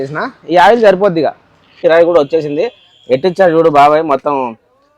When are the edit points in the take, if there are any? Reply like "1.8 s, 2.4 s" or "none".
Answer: 1.8 s